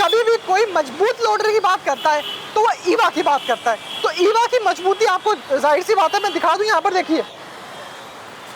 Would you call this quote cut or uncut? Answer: uncut